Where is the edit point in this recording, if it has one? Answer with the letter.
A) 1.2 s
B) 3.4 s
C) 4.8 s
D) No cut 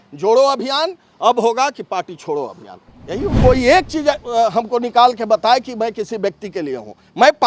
B